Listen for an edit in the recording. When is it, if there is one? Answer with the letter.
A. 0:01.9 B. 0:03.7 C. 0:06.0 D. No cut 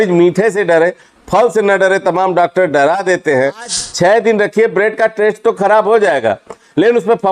B